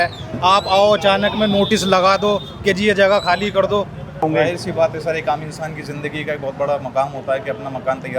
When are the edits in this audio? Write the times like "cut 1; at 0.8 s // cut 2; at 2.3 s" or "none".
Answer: cut 1; at 4.2 s